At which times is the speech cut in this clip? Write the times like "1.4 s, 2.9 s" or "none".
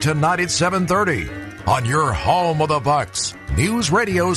none